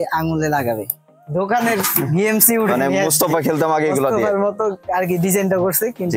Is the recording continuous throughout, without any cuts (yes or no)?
no